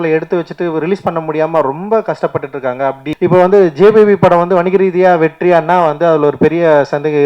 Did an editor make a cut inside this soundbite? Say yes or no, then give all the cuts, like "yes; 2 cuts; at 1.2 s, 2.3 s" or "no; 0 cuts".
yes; 1 cut; at 3.1 s